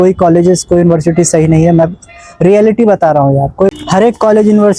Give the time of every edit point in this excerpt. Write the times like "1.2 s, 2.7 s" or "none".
3.7 s